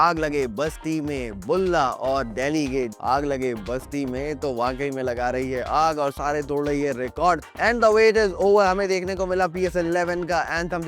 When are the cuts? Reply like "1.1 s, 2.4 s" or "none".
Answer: 2.9 s, 7.5 s